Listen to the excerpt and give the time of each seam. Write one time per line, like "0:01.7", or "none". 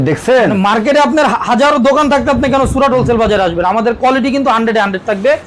none

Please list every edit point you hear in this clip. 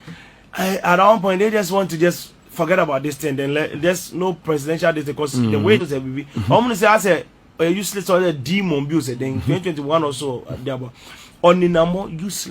0:05.8

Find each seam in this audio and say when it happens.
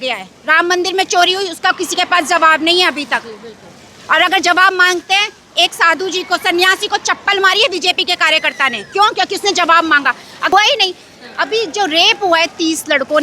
0:10.5

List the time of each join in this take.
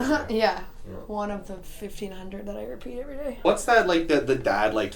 0:03.4

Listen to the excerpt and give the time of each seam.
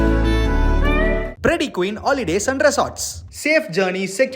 0:01.3

